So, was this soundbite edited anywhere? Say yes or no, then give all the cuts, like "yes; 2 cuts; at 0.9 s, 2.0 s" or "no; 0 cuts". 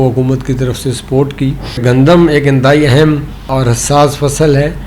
yes; 2 cuts; at 1.8 s, 3.5 s